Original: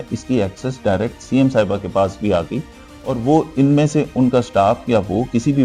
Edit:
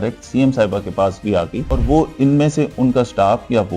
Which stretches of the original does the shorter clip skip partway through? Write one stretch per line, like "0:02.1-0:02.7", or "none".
0:02.6-0:03.0